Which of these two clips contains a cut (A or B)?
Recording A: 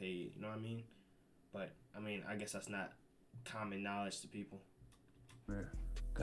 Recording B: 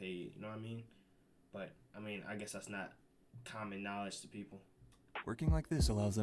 B